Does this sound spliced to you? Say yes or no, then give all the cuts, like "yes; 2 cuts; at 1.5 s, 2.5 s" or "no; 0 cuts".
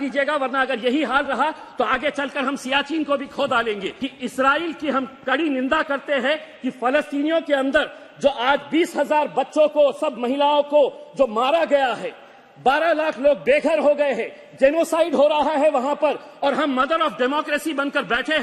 yes; 1 cut; at 4.0 s